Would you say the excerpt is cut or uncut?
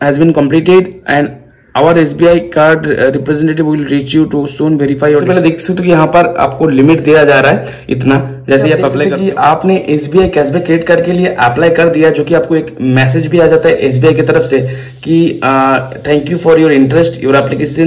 cut